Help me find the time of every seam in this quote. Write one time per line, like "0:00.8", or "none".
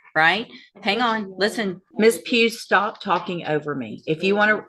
0:01.8